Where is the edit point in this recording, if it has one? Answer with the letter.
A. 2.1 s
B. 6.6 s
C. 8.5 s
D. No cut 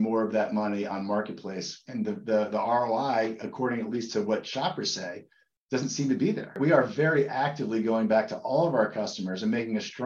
B